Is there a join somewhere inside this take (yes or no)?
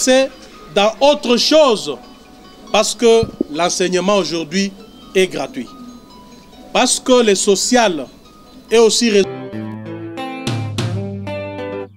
yes